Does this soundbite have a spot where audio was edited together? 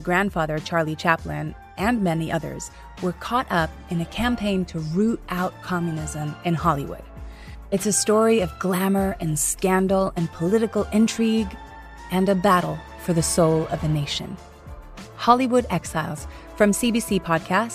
no; 0 cuts

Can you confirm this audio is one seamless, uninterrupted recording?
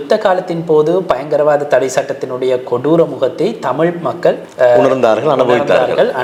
yes; 0 cuts

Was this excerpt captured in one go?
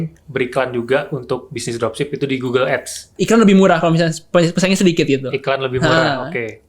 no; 1 cut; at 3.1 s

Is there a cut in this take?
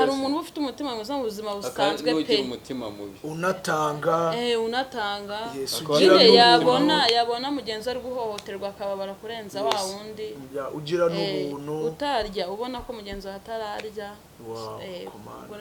no; 0 cuts

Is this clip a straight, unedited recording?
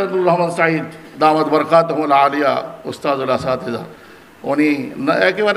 no; 1 cut; at 1.0 s

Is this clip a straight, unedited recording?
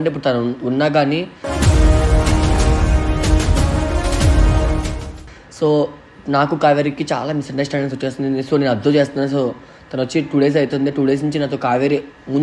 yes; 0 cuts

